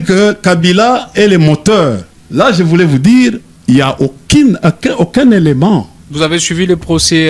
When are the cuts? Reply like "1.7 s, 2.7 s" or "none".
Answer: none

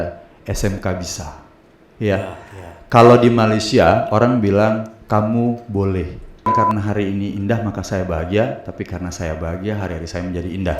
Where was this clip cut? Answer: 6.5 s

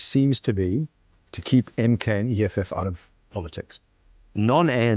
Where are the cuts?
4.0 s

